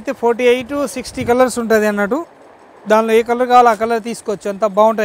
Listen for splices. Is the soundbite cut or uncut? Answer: uncut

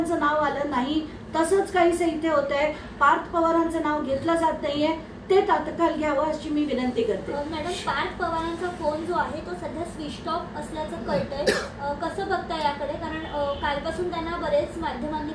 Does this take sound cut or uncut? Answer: uncut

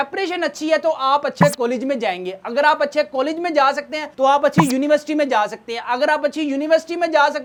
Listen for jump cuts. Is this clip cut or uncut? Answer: uncut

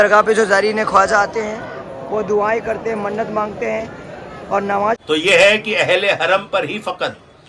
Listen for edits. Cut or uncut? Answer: cut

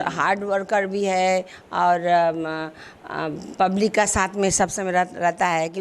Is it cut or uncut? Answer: uncut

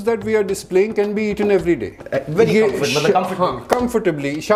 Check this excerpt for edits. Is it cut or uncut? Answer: uncut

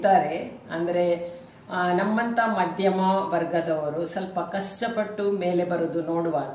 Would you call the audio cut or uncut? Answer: uncut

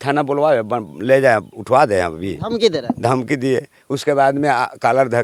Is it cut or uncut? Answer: uncut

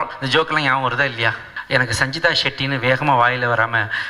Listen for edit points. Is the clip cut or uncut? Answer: cut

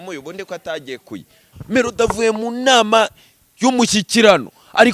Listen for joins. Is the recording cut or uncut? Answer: cut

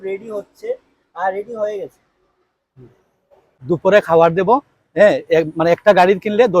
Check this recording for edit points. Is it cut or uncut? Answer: cut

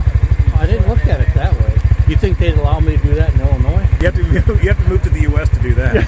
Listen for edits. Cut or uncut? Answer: cut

